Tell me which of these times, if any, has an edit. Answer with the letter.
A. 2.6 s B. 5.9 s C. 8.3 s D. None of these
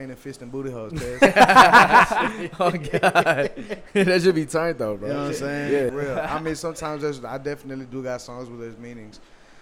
B